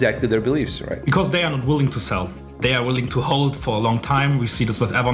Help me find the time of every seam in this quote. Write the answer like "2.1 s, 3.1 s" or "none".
none

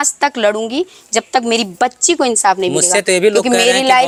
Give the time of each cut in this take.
none

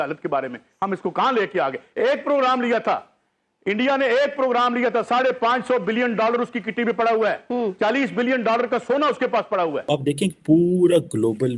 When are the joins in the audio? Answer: 9.9 s

